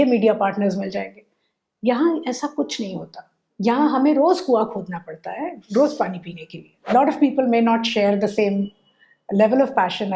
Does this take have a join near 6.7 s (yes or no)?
yes